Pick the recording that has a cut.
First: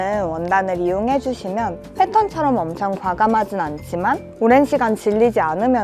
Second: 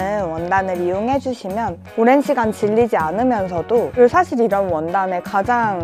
second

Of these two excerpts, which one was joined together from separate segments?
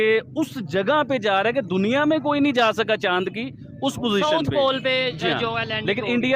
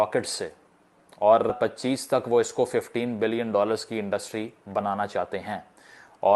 second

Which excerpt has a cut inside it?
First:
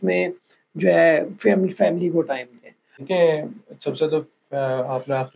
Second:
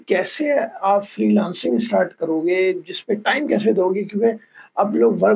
first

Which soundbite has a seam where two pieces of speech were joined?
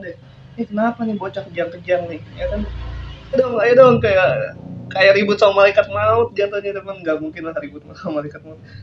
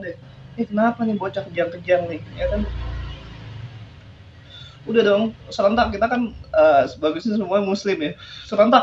first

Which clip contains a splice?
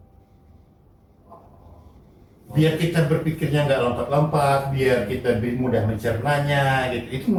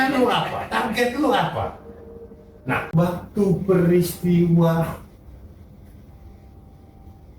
second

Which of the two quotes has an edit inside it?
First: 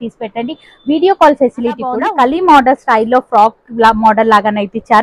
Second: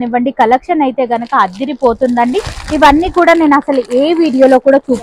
first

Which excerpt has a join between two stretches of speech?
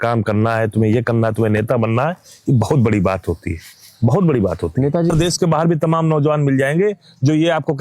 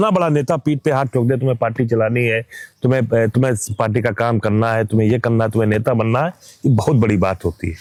first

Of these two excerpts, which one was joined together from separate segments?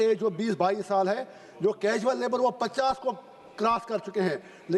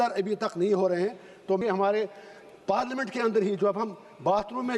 second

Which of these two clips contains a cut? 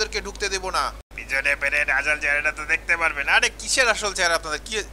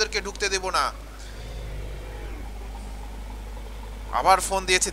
first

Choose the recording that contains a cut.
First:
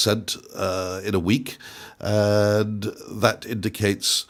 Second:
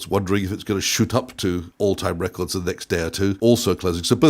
second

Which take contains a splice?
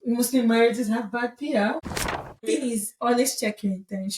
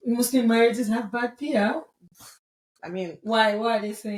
first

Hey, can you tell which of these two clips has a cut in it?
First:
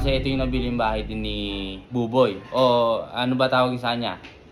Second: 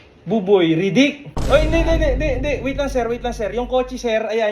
second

